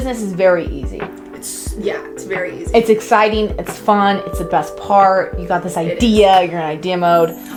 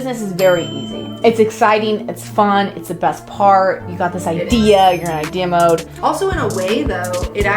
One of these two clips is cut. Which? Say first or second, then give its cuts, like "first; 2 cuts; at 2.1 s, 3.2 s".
second; 2 cuts; at 1.0 s, 5.9 s